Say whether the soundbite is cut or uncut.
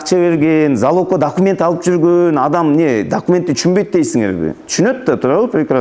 uncut